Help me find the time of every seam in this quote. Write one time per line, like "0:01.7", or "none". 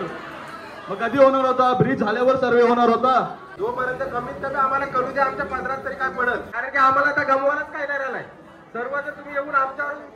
0:03.4
0:06.5